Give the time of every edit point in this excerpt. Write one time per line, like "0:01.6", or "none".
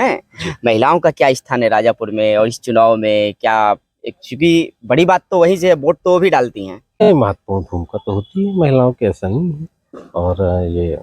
0:07.1

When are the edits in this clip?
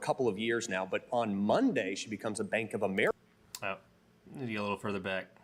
none

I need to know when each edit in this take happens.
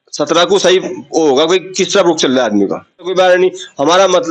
0:03.1

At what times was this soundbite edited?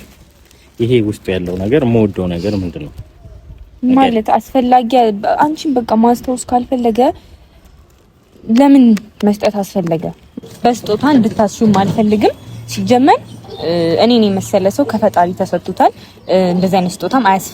0:10.3

